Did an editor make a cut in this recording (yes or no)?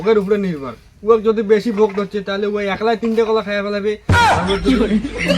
no